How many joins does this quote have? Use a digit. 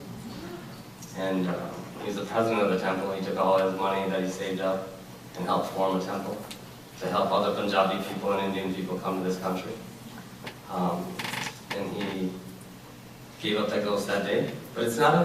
1